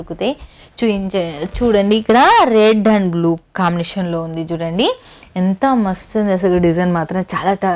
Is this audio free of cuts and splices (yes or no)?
yes